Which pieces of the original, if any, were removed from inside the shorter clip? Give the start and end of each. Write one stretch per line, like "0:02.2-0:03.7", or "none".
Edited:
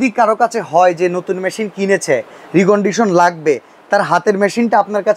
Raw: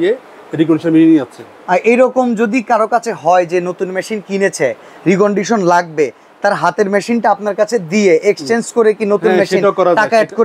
none